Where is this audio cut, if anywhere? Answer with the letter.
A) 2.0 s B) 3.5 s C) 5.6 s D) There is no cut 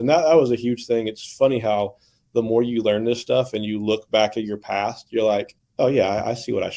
C